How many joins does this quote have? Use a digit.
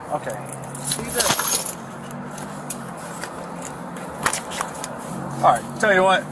1